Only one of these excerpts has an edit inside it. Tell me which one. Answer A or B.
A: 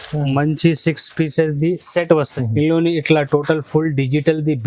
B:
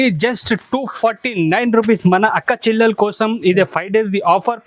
A